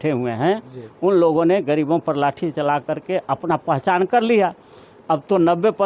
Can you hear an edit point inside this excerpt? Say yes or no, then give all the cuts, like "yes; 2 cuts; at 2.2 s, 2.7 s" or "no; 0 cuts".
no; 0 cuts